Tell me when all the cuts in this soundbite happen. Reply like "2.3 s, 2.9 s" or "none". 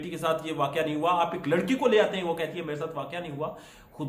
none